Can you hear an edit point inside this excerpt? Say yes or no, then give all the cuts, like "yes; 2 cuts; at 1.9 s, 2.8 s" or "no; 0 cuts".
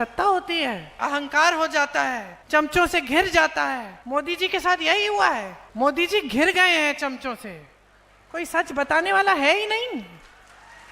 yes; 4 cuts; at 1.0 s, 2.3 s, 3.9 s, 5.6 s